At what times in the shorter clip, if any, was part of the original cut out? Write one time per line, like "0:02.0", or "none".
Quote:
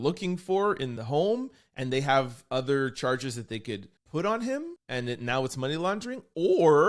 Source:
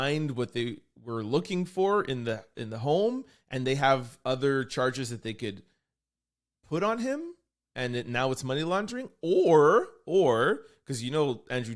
0:00.9
0:03.9
0:04.8